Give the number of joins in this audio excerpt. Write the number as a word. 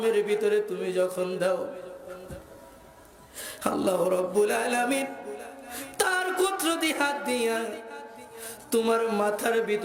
zero